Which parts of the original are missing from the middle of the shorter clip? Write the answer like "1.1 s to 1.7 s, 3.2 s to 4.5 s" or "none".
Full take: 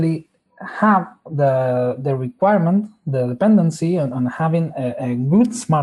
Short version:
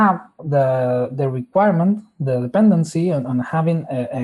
none